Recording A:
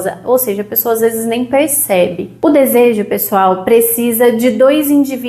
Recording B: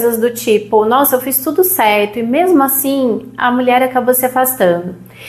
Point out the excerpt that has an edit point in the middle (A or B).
A